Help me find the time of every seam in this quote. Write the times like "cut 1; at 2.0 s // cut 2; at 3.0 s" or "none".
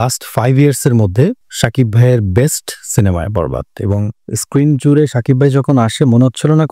cut 1; at 4.2 s